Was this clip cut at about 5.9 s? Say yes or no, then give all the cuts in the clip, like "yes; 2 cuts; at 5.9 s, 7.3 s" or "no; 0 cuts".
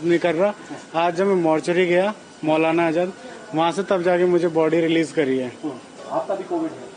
yes; 1 cut; at 5.9 s